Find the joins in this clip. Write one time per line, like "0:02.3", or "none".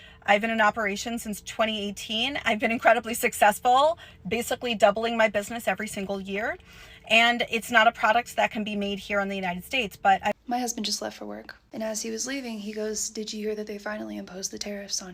0:10.3